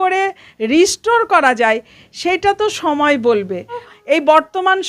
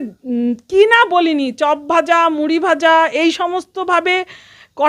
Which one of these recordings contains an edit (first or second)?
first